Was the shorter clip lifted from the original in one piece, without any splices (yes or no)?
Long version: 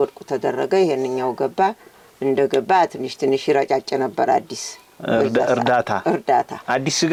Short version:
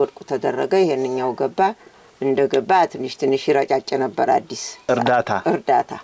no